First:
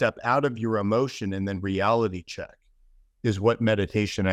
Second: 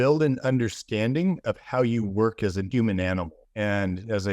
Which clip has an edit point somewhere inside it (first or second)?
second